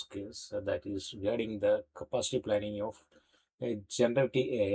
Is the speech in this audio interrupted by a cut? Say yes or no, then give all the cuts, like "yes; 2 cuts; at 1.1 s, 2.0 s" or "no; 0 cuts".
no; 0 cuts